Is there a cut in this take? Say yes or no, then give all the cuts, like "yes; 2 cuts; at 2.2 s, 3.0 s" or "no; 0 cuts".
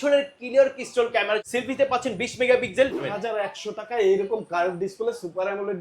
yes; 2 cuts; at 1.4 s, 3.0 s